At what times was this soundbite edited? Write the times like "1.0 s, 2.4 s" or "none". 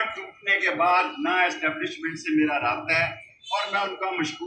none